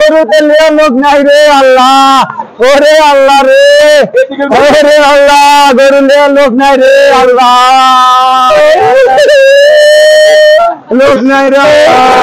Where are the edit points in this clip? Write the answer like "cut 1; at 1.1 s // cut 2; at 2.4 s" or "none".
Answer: none